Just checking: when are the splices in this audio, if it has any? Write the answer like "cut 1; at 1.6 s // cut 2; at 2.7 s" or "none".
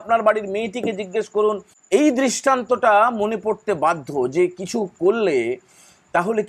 cut 1; at 1.7 s